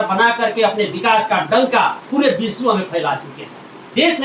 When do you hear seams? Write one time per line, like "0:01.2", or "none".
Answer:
none